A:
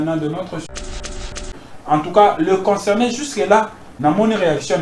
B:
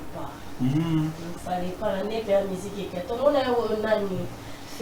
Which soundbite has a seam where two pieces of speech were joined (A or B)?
A